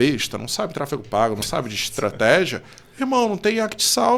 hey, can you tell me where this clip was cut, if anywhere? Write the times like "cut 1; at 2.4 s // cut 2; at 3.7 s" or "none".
none